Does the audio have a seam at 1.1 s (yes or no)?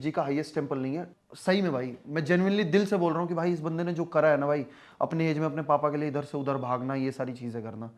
yes